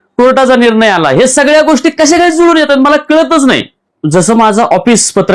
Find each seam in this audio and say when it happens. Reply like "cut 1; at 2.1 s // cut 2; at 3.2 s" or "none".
cut 1; at 3.8 s